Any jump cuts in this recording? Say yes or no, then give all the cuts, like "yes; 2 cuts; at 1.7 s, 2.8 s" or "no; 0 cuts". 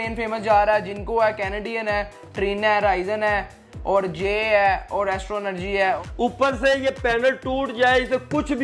yes; 1 cut; at 6.0 s